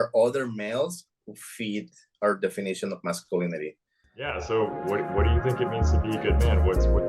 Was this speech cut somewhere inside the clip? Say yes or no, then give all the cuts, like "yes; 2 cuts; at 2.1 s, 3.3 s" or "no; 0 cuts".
yes; 1 cut; at 4.1 s